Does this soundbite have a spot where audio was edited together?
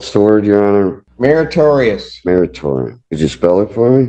yes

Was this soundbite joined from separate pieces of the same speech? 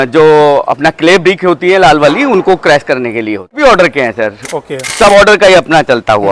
yes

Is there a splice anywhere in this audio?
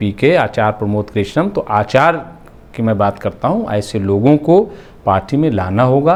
no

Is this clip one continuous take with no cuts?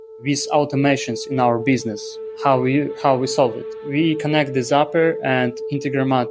yes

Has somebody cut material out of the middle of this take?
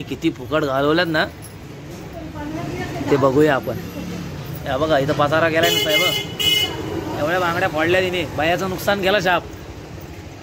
no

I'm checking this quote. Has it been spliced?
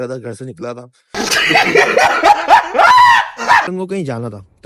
yes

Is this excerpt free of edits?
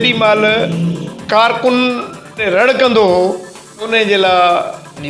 no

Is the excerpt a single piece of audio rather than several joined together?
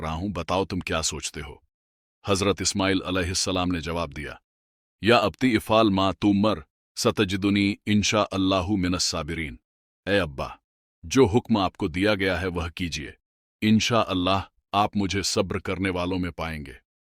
yes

